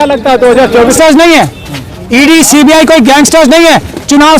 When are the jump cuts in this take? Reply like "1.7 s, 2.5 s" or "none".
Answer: 1.0 s